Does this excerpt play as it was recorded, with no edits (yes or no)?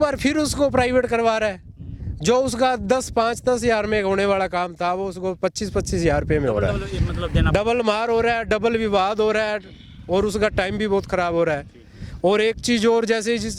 yes